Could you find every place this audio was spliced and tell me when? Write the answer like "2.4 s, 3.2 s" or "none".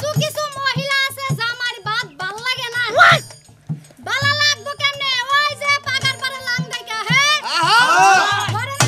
none